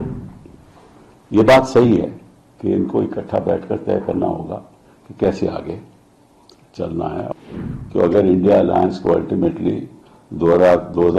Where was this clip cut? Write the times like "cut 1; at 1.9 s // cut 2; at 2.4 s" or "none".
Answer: cut 1; at 7.3 s